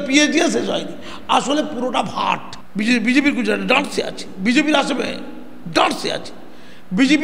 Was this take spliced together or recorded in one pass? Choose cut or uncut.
cut